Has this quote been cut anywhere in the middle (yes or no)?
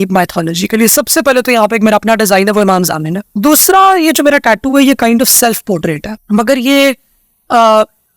yes